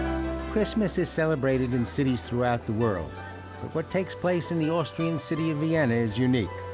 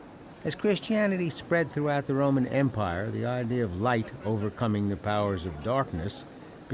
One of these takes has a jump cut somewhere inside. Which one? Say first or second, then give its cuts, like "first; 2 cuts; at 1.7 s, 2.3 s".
second; 1 cut; at 3.2 s